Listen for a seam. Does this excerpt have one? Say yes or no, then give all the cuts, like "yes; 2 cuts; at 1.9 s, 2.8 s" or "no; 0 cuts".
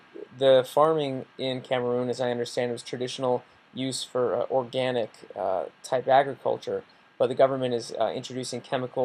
yes; 1 cut; at 2.9 s